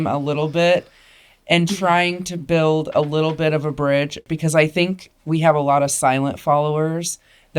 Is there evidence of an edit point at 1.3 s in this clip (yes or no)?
no